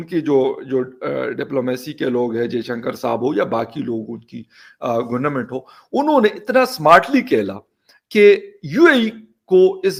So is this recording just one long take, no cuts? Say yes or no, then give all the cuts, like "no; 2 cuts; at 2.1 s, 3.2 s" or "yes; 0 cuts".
yes; 0 cuts